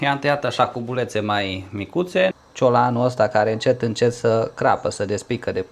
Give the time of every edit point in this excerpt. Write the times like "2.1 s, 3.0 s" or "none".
2.4 s